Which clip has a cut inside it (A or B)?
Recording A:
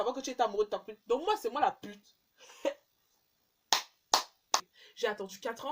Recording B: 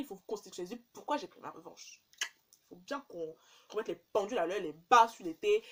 A